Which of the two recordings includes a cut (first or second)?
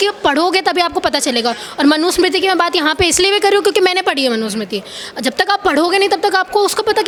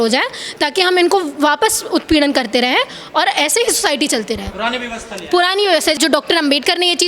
second